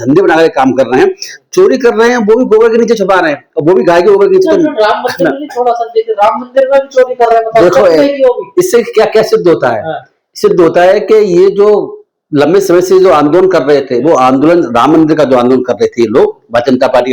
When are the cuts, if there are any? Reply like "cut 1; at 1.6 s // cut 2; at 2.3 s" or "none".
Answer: none